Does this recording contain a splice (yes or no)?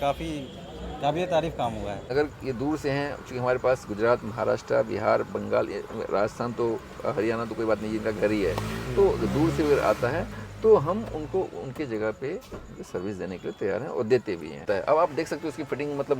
yes